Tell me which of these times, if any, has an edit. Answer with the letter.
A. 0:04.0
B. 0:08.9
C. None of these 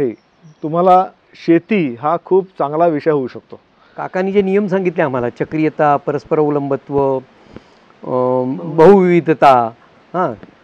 A